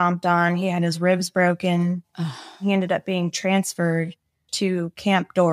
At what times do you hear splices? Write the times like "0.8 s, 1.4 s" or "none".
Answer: 2.6 s, 4.5 s